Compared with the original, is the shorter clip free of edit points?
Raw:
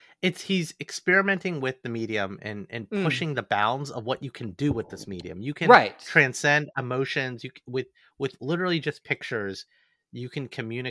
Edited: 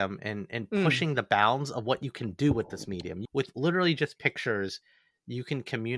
no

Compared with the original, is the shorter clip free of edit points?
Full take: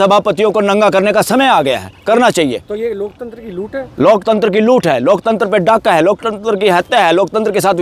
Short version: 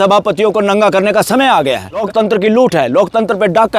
no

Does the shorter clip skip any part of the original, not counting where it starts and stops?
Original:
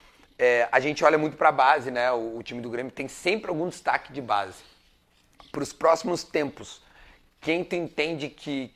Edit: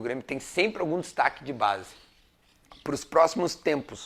no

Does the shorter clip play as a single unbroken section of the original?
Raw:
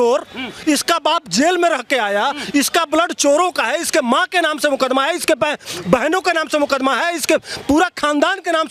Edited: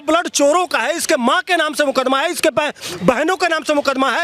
yes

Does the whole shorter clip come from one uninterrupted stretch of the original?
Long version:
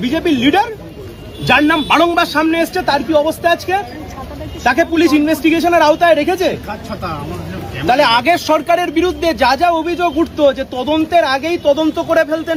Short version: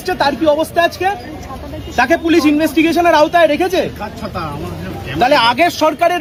yes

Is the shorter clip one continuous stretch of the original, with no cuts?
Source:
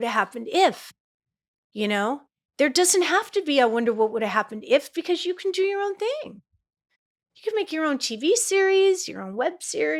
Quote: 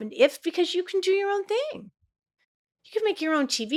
yes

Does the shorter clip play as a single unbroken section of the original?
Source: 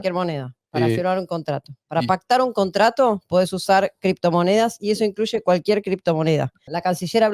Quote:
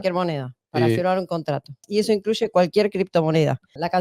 no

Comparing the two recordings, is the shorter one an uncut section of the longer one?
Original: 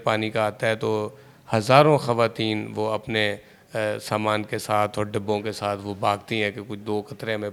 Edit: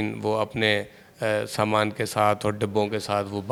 yes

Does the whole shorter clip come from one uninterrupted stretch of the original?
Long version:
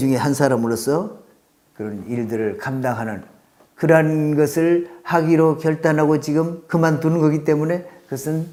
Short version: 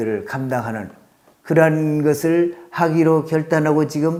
yes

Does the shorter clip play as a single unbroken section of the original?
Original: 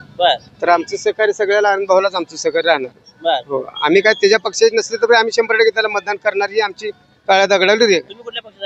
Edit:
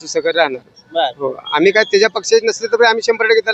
yes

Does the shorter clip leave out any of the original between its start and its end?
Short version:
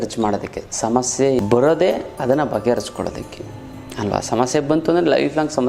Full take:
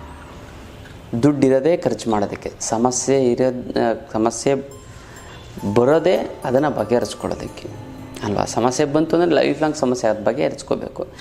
yes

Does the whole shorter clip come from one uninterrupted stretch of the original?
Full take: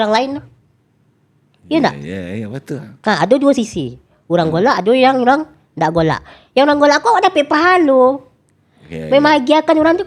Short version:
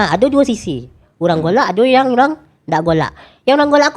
yes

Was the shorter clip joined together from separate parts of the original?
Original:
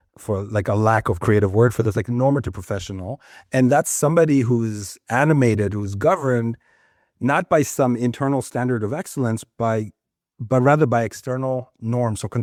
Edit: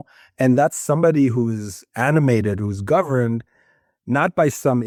no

